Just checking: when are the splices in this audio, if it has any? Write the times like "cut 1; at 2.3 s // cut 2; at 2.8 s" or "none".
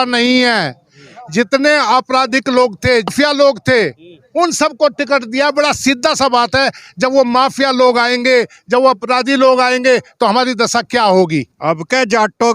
cut 1; at 3.1 s // cut 2; at 11.5 s